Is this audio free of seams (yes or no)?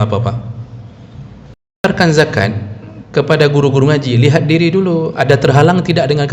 no